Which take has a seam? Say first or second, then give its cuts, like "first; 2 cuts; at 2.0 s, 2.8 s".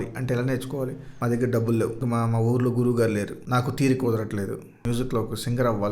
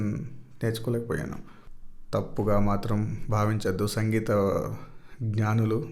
first; 4 cuts; at 1.0 s, 2.0 s, 3.4 s, 4.8 s